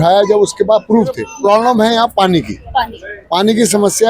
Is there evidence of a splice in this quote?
yes; 1 cut; at 1.3 s

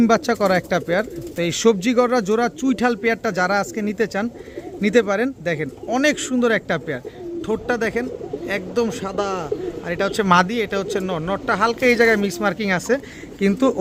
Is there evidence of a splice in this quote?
no; 0 cuts

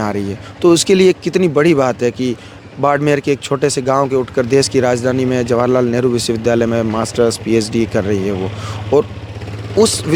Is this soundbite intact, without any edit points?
yes; 0 cuts

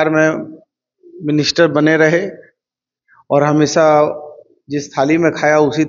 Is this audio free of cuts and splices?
yes; 0 cuts

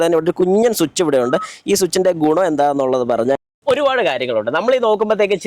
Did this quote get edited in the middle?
yes; 1 cut; at 3.4 s

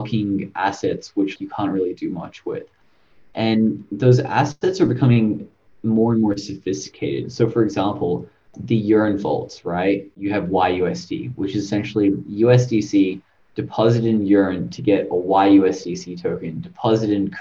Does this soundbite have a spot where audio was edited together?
yes; 1 cut; at 1.3 s

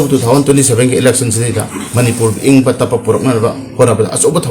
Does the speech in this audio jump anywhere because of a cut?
no; 0 cuts

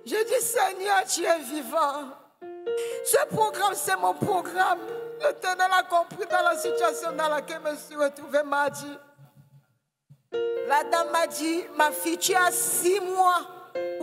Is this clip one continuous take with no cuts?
yes; 0 cuts

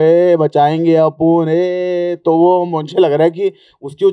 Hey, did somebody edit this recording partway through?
no; 0 cuts

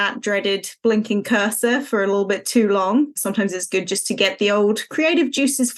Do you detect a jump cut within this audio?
yes; 1 cut; at 3.2 s

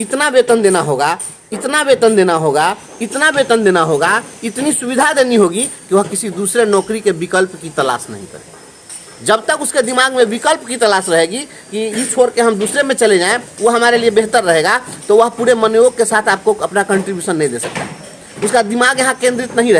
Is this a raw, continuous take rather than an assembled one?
yes; 0 cuts

